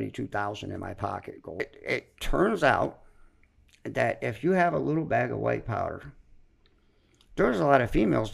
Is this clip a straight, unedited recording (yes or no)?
no